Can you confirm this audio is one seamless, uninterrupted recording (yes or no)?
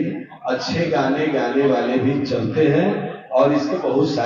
yes